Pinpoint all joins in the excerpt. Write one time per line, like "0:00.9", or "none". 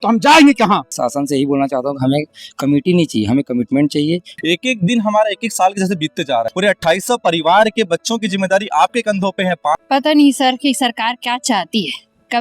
0:01.0
0:04.3
0:06.5
0:09.8